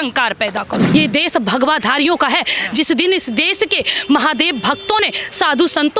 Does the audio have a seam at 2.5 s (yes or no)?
no